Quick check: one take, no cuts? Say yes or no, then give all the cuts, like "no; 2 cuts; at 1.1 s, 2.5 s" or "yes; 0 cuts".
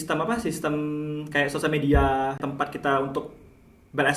no; 1 cut; at 2.4 s